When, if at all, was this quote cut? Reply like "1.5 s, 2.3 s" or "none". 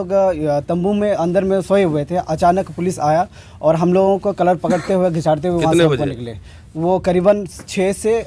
none